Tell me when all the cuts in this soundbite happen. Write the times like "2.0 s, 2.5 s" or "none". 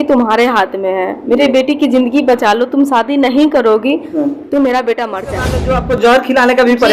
5.6 s